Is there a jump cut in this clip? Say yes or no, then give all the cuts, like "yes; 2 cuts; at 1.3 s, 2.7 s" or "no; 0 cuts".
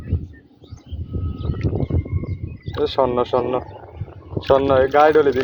no; 0 cuts